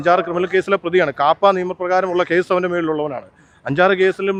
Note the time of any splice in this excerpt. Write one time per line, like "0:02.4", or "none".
none